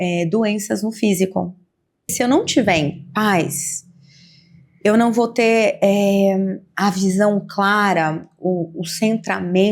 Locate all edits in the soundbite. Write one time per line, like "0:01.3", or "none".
0:02.1